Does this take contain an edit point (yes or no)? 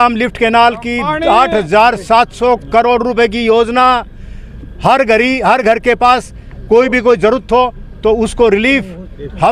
no